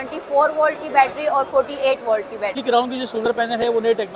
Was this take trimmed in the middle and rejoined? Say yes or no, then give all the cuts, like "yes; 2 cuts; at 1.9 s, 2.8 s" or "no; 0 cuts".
yes; 1 cut; at 2.6 s